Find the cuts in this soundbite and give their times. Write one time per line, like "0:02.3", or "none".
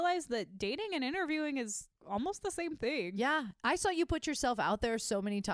0:01.9

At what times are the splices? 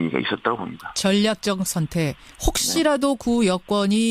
0:02.6

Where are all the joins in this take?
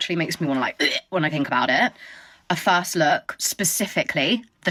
none

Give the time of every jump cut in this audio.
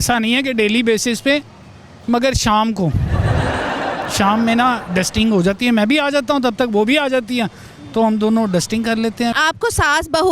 0:09.3

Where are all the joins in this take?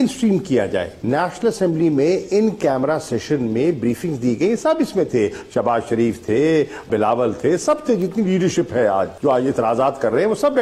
0:00.9
0:06.9
0:09.1

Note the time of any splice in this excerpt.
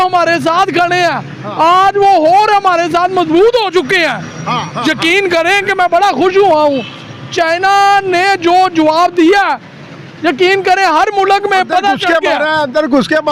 none

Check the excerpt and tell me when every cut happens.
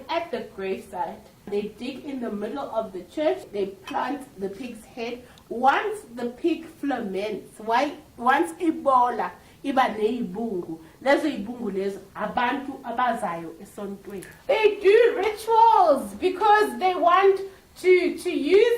0:01.5
0:03.5
0:14.3

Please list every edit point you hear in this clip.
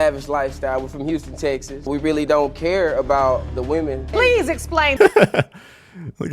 0:05.0

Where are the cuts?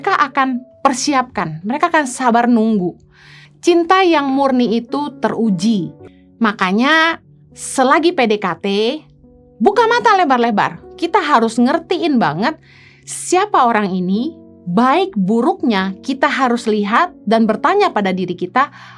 0:06.0

